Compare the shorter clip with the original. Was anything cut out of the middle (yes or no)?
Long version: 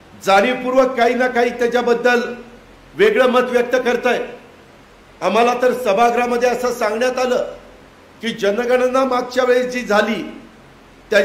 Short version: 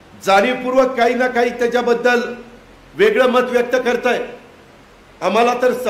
no